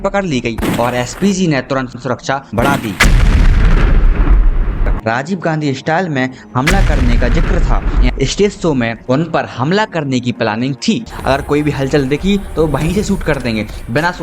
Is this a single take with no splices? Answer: no; 3 cuts; at 4.9 s, 8.0 s, 11.1 s

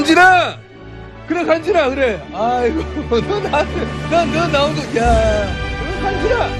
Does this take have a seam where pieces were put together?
yes; 1 cut; at 5.7 s

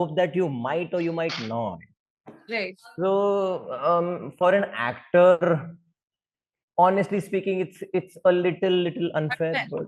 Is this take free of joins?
yes; 0 cuts

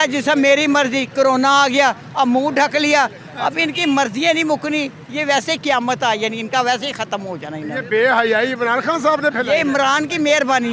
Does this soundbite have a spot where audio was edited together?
no; 0 cuts

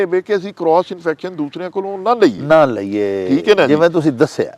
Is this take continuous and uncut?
yes; 0 cuts

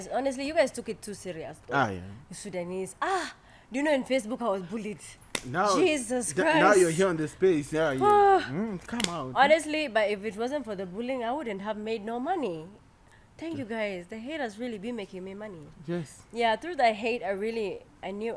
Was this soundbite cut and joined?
no; 0 cuts

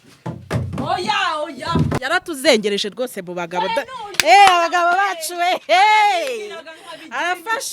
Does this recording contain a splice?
yes; 1 cut; at 2.0 s

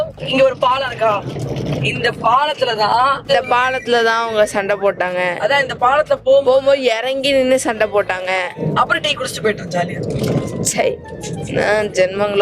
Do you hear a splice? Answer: yes; 2 cuts; at 3.2 s, 8.6 s

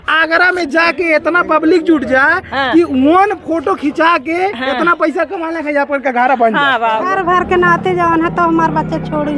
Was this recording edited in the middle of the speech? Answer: yes; 1 cut; at 6.9 s

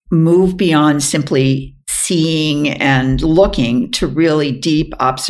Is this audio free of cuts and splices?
yes; 0 cuts

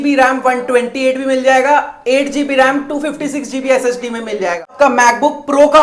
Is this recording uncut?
no; 1 cut; at 4.7 s

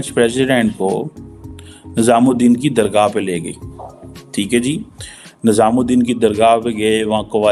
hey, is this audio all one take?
yes; 0 cuts

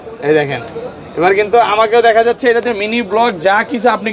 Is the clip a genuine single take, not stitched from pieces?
yes; 0 cuts

